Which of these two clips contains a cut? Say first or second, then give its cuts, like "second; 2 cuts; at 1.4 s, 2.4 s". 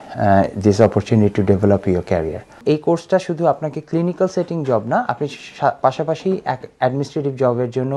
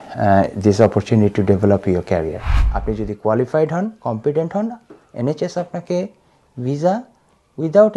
second; 1 cut; at 2.5 s